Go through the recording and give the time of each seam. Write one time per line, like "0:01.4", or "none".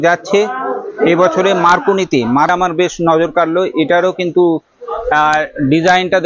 0:02.5